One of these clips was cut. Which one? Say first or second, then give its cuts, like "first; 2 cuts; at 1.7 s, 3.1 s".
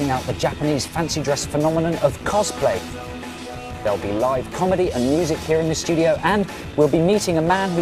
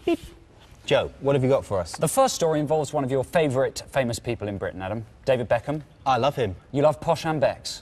second; 1 cut; at 2.4 s